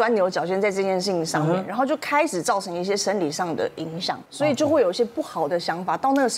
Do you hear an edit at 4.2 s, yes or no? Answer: yes